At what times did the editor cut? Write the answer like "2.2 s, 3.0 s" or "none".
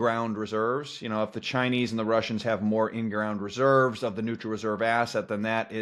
none